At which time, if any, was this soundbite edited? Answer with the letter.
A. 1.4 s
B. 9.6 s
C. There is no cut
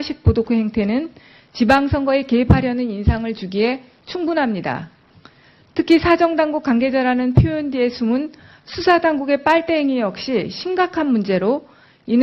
B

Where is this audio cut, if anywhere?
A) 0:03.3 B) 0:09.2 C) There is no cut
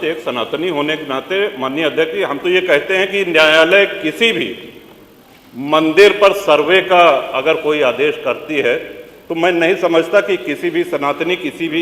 C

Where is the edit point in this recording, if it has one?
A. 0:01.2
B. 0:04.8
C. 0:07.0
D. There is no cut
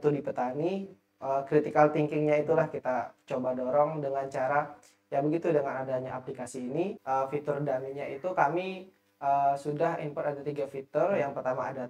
C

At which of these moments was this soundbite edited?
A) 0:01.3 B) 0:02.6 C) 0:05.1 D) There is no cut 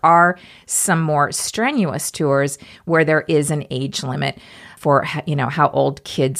D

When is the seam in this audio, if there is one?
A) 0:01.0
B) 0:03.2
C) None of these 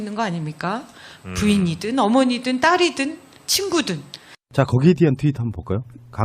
B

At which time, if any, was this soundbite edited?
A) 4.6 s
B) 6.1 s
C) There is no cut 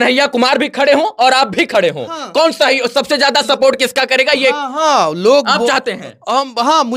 C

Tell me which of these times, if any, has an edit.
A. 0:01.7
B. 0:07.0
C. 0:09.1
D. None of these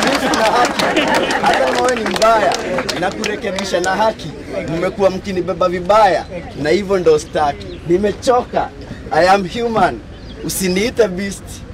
A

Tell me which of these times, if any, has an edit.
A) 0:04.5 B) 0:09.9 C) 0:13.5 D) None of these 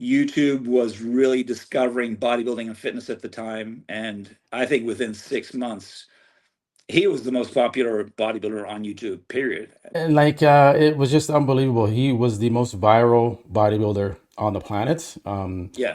B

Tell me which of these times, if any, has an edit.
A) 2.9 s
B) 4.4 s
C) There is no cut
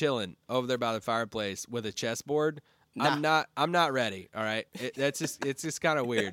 C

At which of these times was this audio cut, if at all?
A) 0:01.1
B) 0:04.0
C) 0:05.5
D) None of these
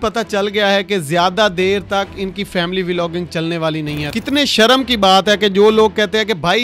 B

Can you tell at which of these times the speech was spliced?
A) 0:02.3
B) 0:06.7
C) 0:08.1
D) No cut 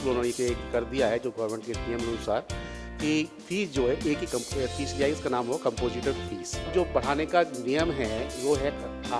B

